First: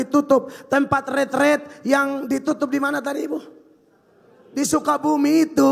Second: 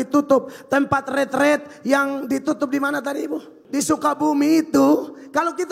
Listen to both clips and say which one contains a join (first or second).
second